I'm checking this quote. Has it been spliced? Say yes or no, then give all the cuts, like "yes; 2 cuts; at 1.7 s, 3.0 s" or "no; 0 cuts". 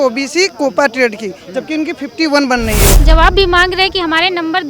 yes; 1 cut; at 3.0 s